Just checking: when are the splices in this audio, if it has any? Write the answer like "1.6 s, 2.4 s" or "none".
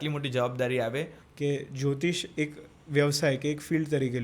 1.2 s

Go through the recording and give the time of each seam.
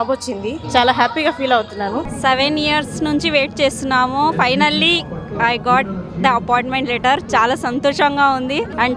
2.1 s

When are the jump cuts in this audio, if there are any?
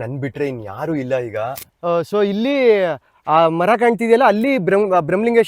1.6 s

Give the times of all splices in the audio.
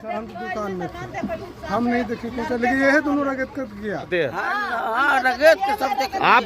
4.1 s

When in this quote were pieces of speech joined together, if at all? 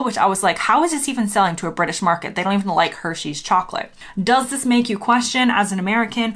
4.0 s

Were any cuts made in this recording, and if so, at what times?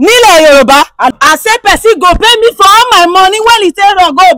1.1 s

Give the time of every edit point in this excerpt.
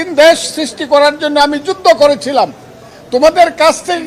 none

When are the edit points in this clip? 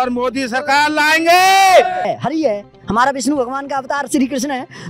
2.0 s

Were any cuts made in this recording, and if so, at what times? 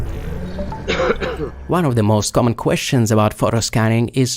1.1 s

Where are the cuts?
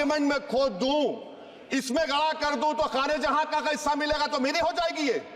none

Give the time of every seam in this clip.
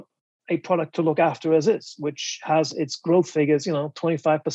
none

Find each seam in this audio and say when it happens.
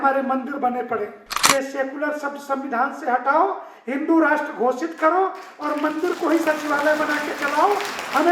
1.3 s

